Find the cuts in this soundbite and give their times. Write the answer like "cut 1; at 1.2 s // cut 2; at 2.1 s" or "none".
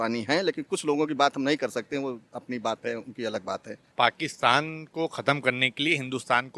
cut 1; at 3.9 s